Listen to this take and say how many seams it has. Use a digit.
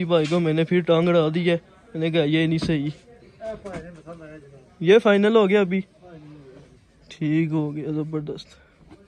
0